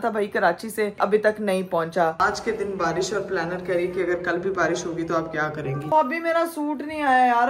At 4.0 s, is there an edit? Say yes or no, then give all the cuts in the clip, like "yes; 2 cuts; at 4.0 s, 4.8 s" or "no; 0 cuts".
no; 2 cuts; at 2.2 s, 5.9 s